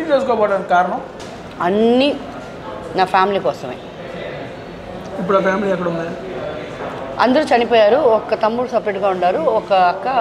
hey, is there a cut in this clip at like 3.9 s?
no; 0 cuts

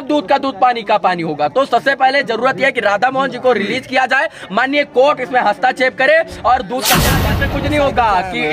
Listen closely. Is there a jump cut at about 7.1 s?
yes; 1 cut; at 7.1 s

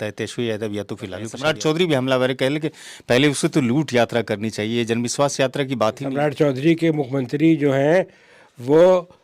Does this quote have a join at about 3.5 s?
no; 2 cuts; at 1.3 s, 6.0 s

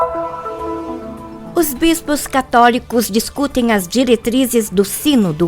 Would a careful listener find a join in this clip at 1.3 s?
yes; 1 cut; at 1.3 s

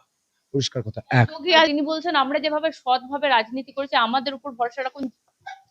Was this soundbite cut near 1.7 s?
yes; 1 cut; at 1.7 s

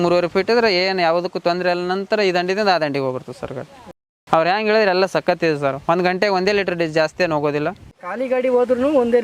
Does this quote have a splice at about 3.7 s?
no; 0 cuts

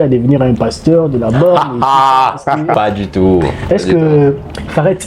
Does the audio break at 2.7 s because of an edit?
yes; 1 cut; at 2.7 s

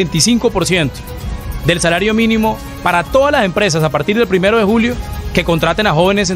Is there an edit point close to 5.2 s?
no; 0 cuts

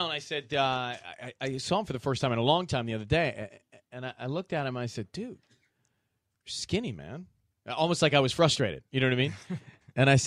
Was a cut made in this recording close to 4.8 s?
no; 1 cut; at 7.6 s

